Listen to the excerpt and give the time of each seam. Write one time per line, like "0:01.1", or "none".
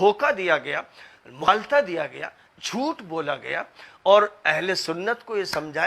0:01.4